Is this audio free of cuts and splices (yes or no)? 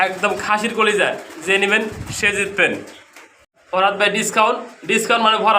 no